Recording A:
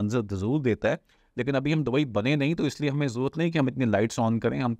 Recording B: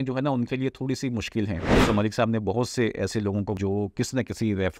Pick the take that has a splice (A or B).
B